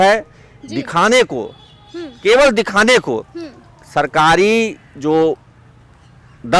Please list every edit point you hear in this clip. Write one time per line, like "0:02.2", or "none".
none